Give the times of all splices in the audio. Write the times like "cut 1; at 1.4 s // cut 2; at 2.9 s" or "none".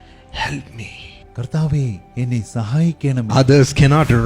cut 1; at 3.3 s